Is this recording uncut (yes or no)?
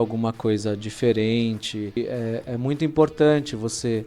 no